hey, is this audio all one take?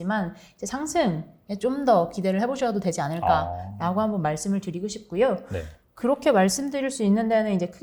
yes; 0 cuts

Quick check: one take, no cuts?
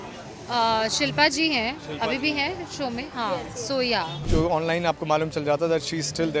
no; 1 cut; at 4.2 s

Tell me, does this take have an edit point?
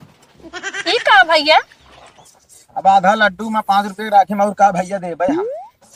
no; 0 cuts

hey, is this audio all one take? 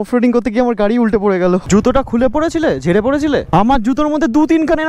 no; 2 cuts; at 1.6 s, 3.5 s

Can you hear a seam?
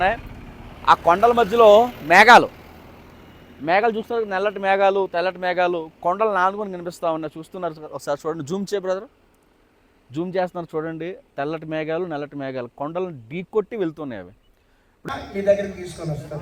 yes; 1 cut; at 15.1 s

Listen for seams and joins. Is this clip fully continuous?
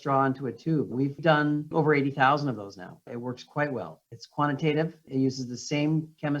no; 3 cuts; at 0.9 s, 1.7 s, 5.0 s

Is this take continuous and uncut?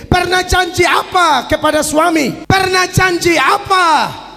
yes; 0 cuts

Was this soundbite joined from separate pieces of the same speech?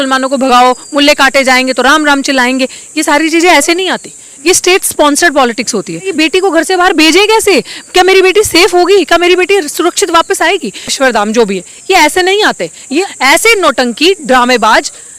yes; 3 cuts; at 6.1 s, 10.9 s, 13.1 s

